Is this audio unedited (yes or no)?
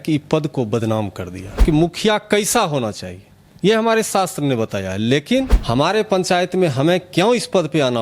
no